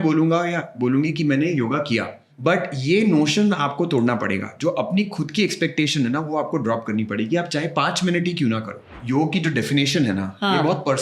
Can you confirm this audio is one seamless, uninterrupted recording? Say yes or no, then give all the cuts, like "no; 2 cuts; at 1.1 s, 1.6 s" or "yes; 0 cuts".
no; 2 cuts; at 2.3 s, 9.0 s